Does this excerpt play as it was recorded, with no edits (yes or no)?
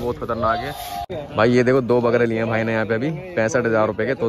no